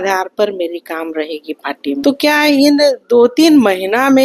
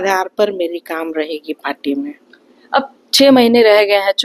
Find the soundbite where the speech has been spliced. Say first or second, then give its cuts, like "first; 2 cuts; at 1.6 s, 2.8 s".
first; 1 cut; at 2.0 s